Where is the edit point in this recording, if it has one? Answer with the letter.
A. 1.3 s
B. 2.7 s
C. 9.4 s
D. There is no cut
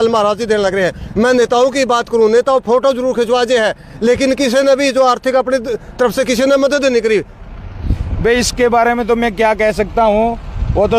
D